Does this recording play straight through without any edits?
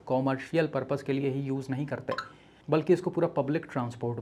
yes; 0 cuts

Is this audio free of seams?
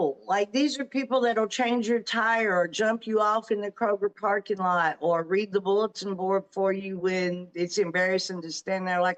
yes; 0 cuts

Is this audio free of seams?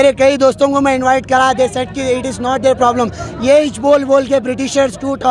yes; 0 cuts

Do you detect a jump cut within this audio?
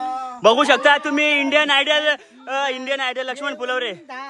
no; 0 cuts

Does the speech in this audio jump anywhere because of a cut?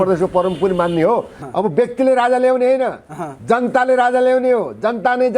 yes; 1 cut; at 1.3 s

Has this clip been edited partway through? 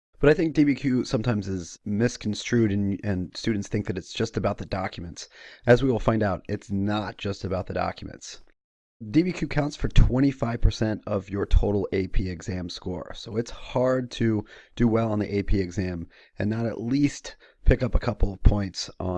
no; 0 cuts

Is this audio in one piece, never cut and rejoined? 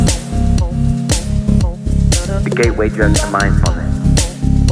yes; 0 cuts

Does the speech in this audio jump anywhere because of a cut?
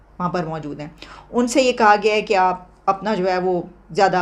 no; 0 cuts

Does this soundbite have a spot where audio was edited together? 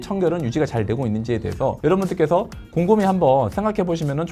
no; 0 cuts

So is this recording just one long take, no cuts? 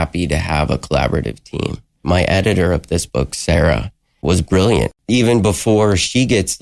no; 3 cuts; at 2.0 s, 4.2 s, 5.0 s

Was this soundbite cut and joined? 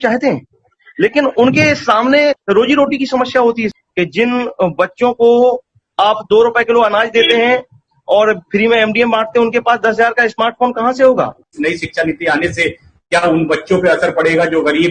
yes; 2 cuts; at 3.7 s, 11.5 s

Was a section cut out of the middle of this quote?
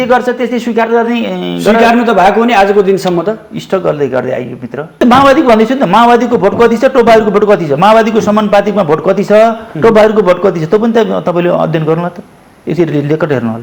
yes; 1 cut; at 5.0 s

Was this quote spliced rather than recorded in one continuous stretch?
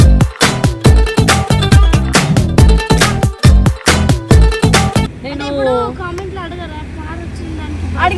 yes; 1 cut; at 5.2 s

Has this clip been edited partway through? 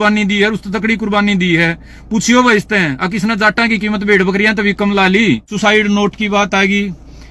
no; 0 cuts

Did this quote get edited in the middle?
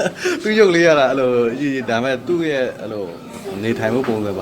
no; 0 cuts

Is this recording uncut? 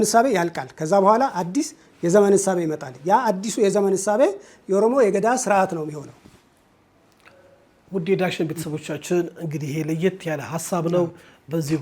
yes; 0 cuts

